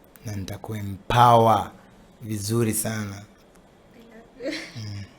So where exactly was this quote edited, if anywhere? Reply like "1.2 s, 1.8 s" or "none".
3.3 s